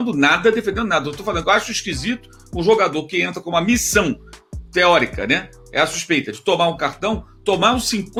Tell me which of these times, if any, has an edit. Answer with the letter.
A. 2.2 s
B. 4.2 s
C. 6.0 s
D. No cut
D